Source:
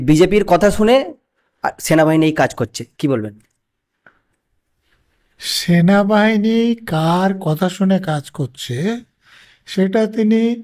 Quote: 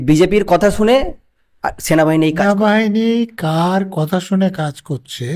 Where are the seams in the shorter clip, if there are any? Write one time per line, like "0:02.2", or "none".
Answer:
0:02.4